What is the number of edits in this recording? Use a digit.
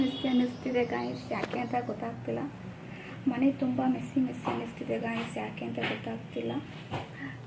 0